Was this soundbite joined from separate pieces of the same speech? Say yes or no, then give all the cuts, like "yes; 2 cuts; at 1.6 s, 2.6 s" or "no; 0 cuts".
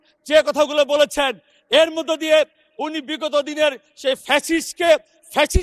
no; 0 cuts